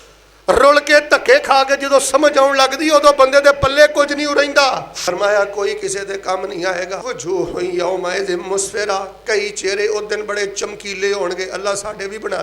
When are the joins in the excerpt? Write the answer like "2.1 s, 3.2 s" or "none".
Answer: 4.9 s, 7.0 s